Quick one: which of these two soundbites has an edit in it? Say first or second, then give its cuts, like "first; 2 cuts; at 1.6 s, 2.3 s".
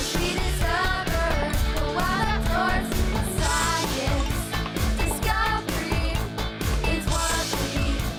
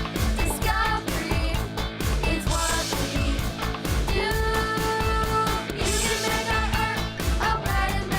second; 1 cut; at 5.7 s